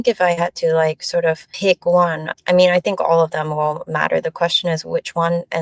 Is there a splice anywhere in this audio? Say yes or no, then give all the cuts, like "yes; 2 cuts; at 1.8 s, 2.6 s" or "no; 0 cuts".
yes; 2 cuts; at 1.5 s, 2.3 s